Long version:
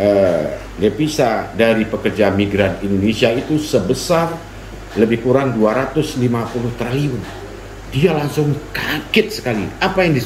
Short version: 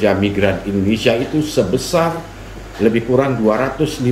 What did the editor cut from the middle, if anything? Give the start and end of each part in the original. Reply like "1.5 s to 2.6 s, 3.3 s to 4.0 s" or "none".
none